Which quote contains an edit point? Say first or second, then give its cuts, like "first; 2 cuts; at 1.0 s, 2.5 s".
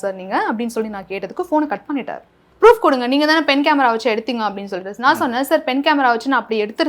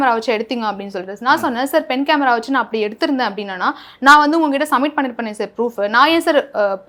first; 1 cut; at 2.4 s